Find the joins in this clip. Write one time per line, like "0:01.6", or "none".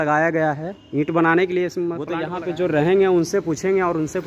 0:02.0

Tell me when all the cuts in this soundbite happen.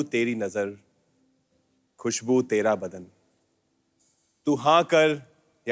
none

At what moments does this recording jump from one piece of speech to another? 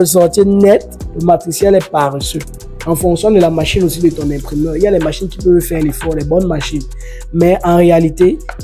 none

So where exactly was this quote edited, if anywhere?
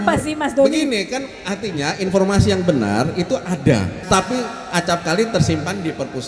0:04.0

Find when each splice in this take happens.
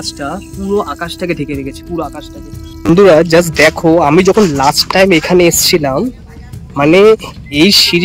0:02.7

